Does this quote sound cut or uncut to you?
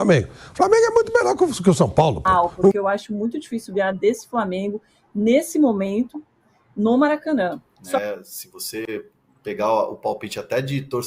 cut